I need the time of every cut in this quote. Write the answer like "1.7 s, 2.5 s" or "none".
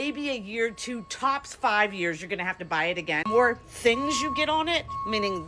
3.3 s

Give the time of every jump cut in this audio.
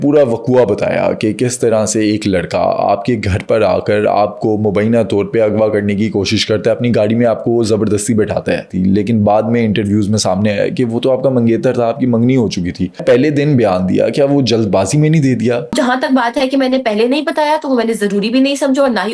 8.7 s, 13.0 s, 15.8 s

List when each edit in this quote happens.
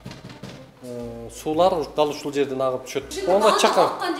3.1 s

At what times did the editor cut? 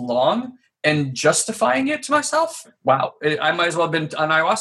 2.6 s

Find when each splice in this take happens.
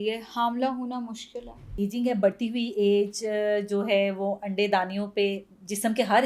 1.7 s

